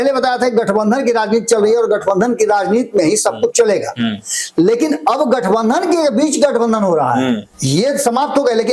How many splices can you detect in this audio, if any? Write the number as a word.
one